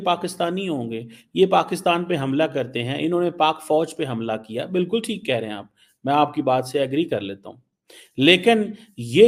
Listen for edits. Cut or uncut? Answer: uncut